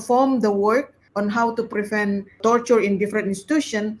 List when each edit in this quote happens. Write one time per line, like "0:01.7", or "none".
0:01.0
0:02.4